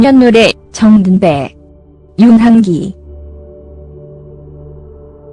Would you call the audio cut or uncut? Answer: uncut